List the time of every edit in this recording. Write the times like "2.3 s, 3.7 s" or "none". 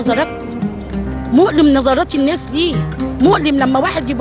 none